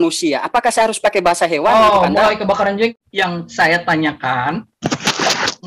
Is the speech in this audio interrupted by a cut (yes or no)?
yes